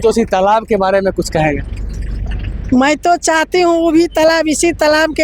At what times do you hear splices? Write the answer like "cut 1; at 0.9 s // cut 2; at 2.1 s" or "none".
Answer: none